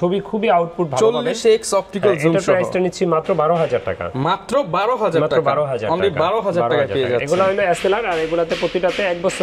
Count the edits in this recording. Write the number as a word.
zero